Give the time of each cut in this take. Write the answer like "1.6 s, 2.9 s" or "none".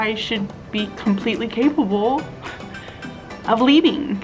none